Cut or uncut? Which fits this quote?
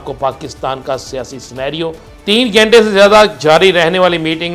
cut